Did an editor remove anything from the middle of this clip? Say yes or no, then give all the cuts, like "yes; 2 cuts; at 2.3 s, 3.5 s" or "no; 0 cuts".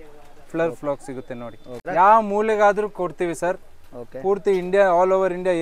yes; 1 cut; at 1.8 s